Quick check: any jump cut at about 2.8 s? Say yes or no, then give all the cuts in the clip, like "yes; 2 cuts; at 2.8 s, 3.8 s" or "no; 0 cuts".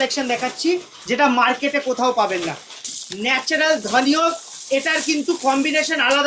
yes; 1 cut; at 2.8 s